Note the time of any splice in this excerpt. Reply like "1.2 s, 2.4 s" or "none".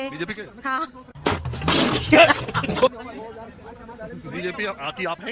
none

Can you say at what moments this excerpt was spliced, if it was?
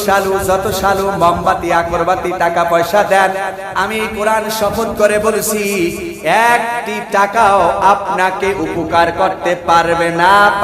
none

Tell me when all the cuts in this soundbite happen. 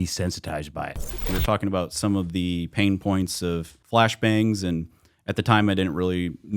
1.3 s, 3.7 s

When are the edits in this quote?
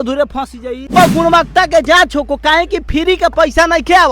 0.9 s

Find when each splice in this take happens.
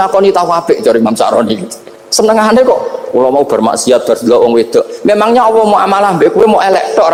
none

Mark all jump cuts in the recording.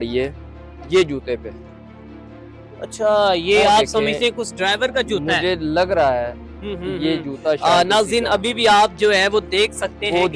none

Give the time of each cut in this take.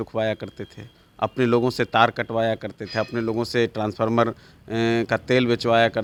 none

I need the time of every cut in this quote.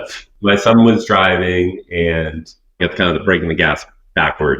2.8 s

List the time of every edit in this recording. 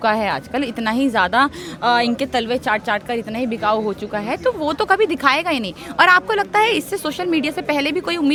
none

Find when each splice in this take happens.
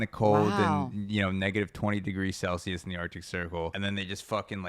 3.7 s

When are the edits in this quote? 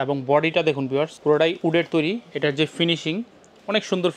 1.1 s

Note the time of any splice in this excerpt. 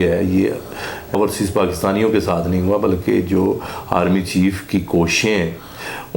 1.1 s

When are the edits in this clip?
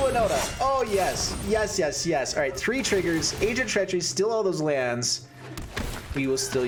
none

